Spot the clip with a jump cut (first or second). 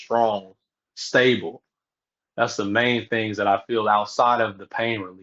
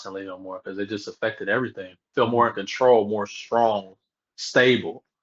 second